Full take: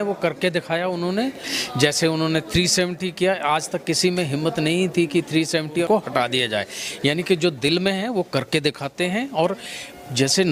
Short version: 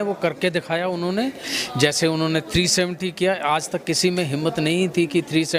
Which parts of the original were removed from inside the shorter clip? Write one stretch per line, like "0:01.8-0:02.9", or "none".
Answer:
none